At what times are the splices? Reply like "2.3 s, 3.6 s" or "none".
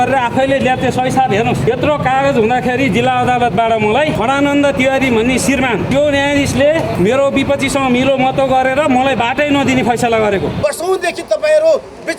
1.6 s, 4.2 s, 5.9 s, 6.9 s, 10.5 s